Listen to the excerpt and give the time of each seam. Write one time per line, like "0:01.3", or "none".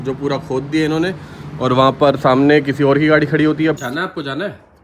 0:03.8